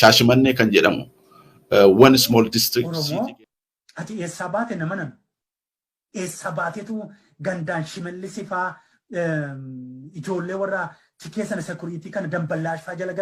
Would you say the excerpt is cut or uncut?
cut